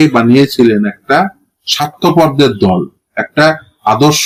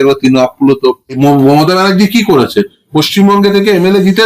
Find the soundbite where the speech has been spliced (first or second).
second